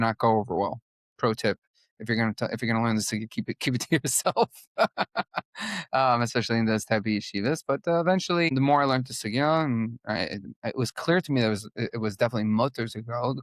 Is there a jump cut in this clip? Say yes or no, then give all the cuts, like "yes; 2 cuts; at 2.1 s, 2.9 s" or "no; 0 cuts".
no; 0 cuts